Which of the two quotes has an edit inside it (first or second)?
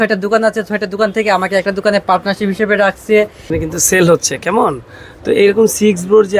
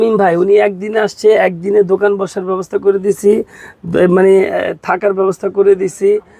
first